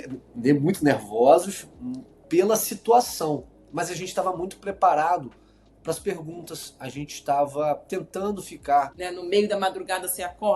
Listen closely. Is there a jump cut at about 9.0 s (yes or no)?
yes